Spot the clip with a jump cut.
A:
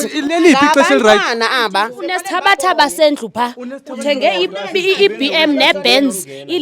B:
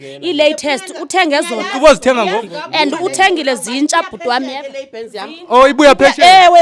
A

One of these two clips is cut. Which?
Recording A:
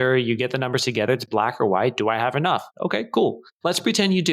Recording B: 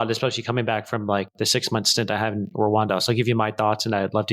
A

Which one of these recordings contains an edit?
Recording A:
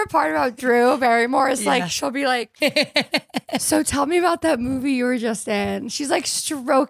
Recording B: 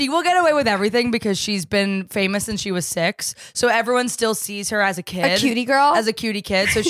A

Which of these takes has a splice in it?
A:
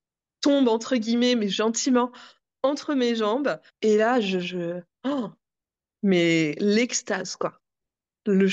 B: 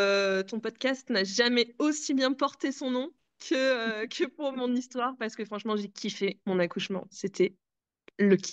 A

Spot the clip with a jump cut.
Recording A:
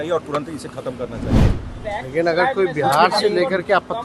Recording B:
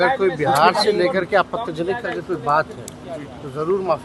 A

